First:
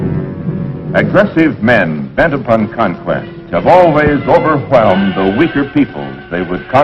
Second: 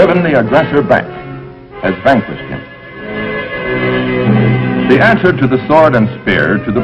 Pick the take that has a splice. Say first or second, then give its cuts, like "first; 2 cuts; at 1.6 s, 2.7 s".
second; 1 cut; at 5.2 s